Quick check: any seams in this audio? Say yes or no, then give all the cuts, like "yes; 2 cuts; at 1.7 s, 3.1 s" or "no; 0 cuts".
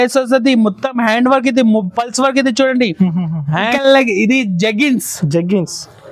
yes; 1 cut; at 3.7 s